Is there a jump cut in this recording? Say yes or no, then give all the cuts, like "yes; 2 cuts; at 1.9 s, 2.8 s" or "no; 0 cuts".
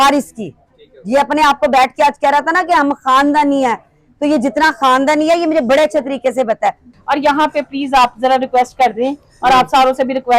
yes; 1 cut; at 6.9 s